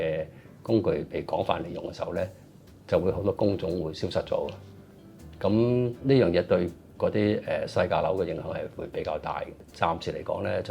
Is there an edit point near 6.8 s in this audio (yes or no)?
no